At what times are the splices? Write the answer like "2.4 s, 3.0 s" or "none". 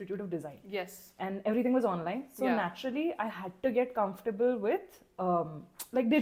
none